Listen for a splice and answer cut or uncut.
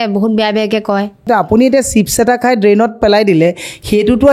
cut